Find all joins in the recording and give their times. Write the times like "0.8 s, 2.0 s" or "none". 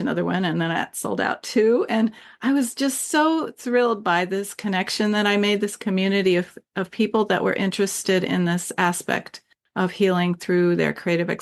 none